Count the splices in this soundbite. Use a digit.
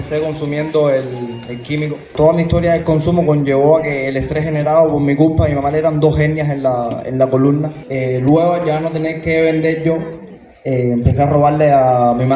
2